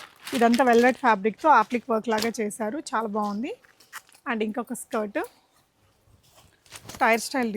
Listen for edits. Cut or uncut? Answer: uncut